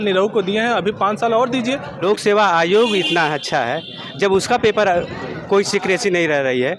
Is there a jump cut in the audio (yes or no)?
yes